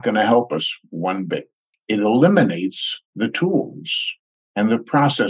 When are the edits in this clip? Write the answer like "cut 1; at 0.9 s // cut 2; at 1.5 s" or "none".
cut 1; at 1.7 s

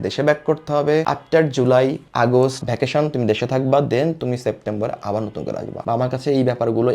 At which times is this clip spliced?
cut 1; at 5.8 s

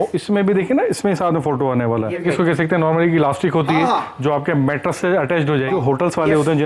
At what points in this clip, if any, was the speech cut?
cut 1; at 2.2 s // cut 2; at 5.7 s

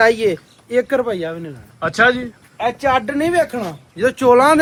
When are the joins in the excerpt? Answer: none

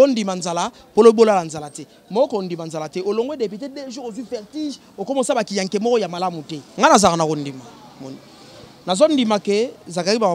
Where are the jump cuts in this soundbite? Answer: cut 1; at 6.6 s

